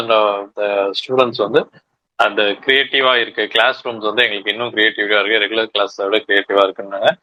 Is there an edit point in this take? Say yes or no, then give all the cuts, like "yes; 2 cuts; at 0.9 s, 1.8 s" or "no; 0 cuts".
no; 0 cuts